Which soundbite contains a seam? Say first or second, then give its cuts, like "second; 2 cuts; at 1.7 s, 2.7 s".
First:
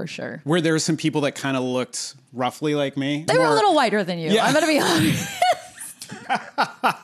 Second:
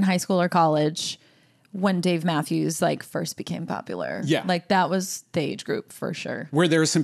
first; 1 cut; at 3.3 s